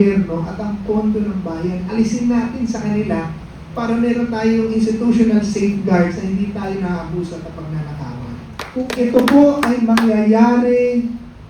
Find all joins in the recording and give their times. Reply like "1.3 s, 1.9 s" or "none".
8.6 s